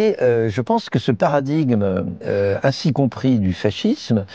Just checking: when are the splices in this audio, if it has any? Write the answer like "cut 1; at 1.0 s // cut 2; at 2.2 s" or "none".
none